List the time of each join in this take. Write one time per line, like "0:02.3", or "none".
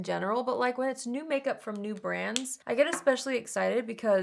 0:02.5